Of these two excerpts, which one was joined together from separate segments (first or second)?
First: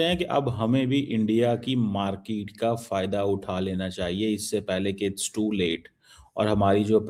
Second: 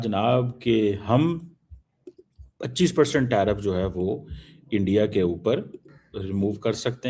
second